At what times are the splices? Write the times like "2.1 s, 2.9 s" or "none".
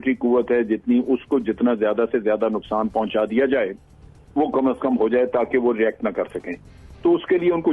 none